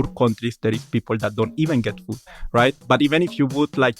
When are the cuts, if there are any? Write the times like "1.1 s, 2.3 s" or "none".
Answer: 2.3 s